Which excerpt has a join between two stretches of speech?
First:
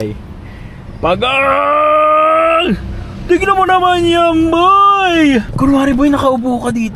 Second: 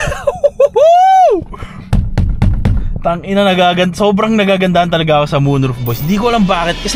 first; 1 cut; at 5.5 s

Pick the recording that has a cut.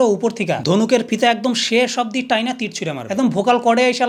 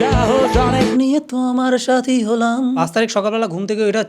second; 2 cuts; at 0.9 s, 2.8 s

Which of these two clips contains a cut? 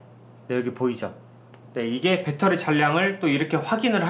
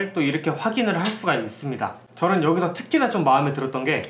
second; 1 cut; at 2.0 s

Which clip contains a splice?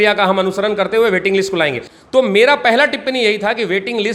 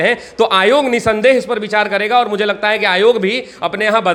first; 1 cut; at 1.8 s

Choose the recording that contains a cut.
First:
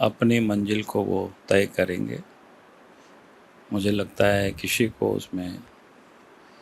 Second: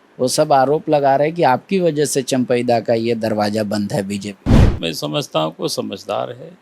second; 1 cut; at 4.8 s

